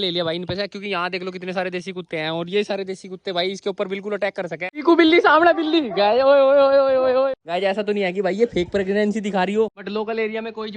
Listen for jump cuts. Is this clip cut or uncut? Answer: cut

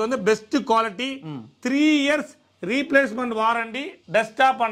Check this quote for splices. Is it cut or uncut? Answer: uncut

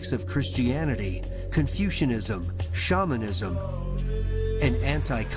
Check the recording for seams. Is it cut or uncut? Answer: uncut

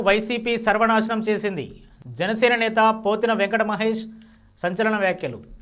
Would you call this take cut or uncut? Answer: uncut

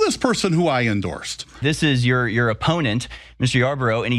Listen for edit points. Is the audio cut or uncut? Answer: cut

